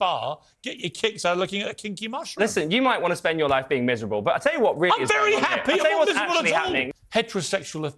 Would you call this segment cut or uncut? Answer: cut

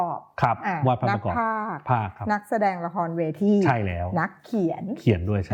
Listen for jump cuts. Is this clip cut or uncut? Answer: uncut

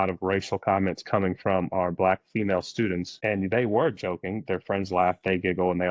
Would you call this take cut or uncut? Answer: uncut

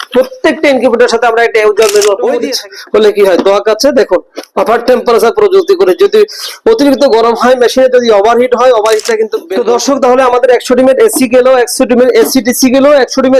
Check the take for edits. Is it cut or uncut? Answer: cut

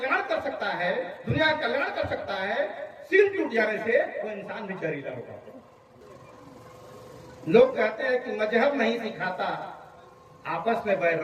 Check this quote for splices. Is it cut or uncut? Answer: cut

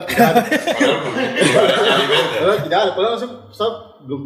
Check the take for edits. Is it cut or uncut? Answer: uncut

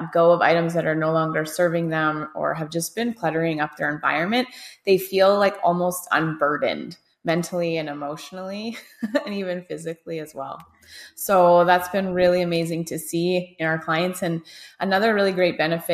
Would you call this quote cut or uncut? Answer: uncut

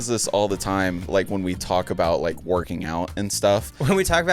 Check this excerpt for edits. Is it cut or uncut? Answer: cut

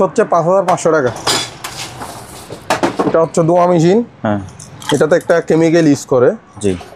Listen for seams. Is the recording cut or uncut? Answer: cut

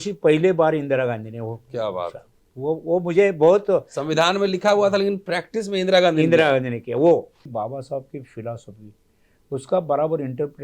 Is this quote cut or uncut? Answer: cut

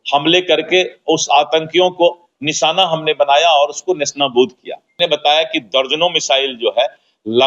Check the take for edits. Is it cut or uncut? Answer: cut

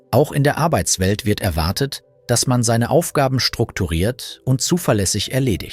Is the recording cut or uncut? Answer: cut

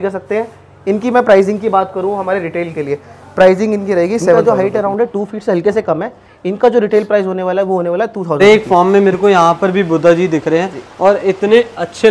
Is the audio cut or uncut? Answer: cut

